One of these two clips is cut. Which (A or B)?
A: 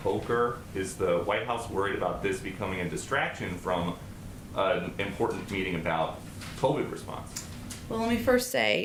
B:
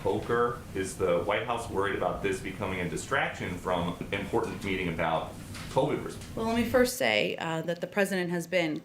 B